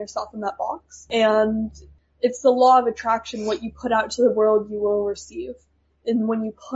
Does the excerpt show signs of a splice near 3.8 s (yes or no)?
no